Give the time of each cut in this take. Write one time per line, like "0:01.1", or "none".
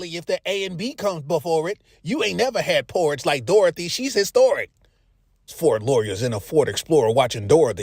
0:05.8